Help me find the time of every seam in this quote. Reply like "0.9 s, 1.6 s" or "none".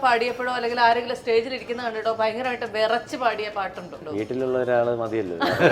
4.0 s